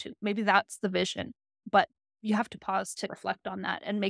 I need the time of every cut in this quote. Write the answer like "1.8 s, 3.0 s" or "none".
3.1 s